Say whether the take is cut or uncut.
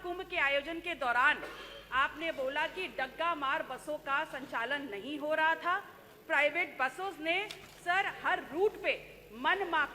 uncut